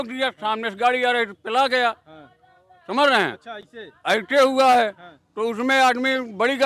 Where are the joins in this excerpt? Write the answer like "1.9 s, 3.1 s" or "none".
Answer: none